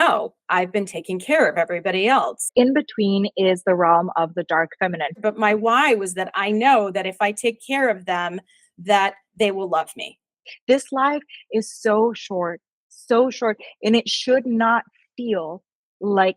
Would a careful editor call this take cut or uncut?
cut